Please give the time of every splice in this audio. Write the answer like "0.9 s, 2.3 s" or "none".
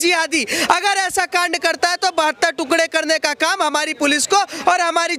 none